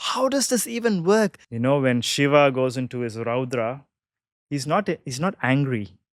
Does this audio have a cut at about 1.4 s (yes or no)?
yes